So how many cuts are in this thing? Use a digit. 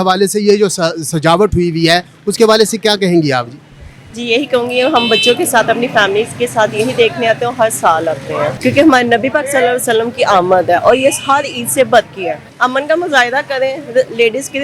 2